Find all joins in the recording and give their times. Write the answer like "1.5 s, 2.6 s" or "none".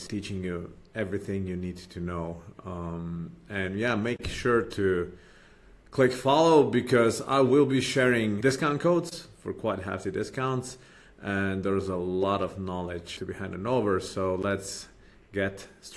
none